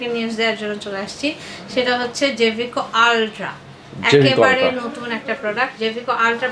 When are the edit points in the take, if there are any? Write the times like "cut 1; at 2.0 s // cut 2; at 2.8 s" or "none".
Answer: none